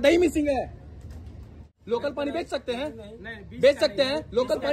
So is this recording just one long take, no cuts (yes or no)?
no